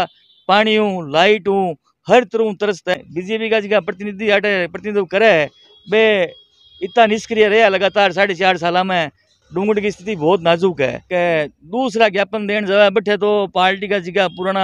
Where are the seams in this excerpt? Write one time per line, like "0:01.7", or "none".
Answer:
0:02.9
0:09.4
0:11.0